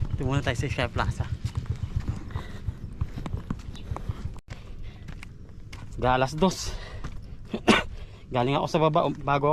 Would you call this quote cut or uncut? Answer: cut